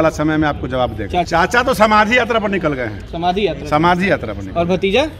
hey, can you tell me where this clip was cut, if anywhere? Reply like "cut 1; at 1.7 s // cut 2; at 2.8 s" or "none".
cut 1; at 1.3 s